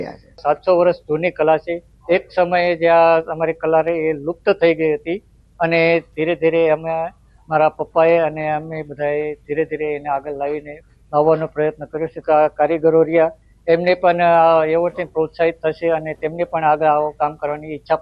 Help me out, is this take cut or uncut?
uncut